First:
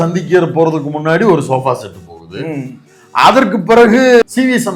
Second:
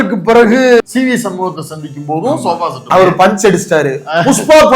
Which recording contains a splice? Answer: second; 1 cut; at 2.9 s

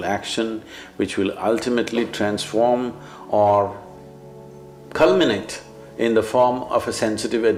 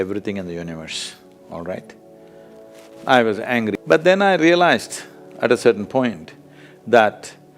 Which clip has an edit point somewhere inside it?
second; 1 cut; at 3.8 s

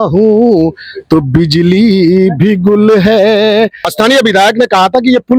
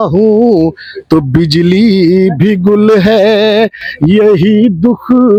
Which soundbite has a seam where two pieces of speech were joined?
first; 1 cut; at 3.8 s

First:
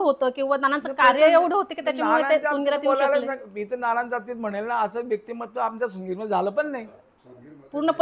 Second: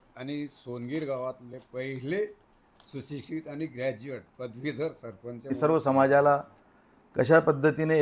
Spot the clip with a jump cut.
second; 1 cut; at 5.5 s

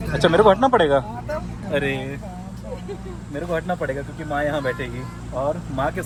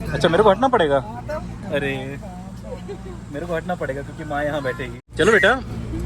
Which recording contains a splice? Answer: second; 1 cut; at 5.0 s

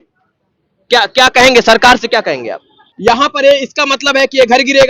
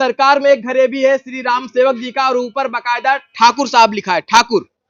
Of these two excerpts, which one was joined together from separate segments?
first; 1 cut; at 2.8 s

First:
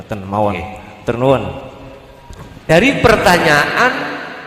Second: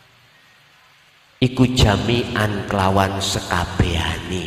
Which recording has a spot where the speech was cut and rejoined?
first; 1 cut; at 2.7 s

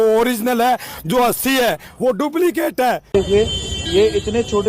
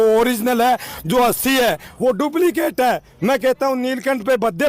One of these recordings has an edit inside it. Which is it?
first; 1 cut; at 3.0 s

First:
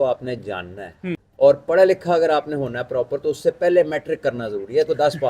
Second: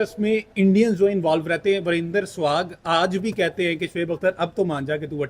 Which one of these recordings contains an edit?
first; 1 cut; at 1.3 s

